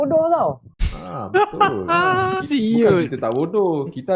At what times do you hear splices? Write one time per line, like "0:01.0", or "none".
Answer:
0:02.4